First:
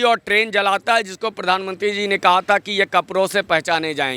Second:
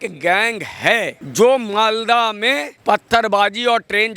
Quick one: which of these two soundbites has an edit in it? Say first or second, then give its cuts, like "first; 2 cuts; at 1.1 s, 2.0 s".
second; 2 cuts; at 1.2 s, 2.7 s